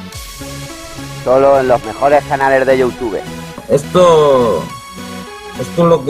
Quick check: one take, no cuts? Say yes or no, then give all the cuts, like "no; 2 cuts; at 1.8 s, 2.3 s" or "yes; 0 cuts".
no; 1 cut; at 3.5 s